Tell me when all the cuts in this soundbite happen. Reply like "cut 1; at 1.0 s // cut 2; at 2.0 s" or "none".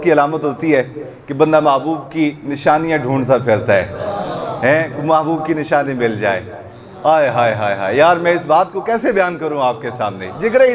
none